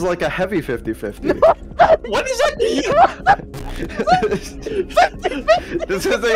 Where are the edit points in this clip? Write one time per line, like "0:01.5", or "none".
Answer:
none